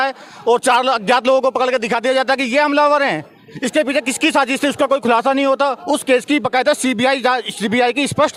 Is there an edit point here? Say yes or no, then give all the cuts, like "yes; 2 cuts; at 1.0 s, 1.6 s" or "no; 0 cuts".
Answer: no; 0 cuts